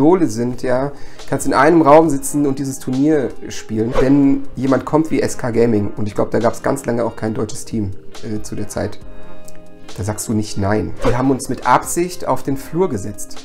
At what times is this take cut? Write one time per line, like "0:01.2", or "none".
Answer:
0:03.9
0:04.5
0:11.0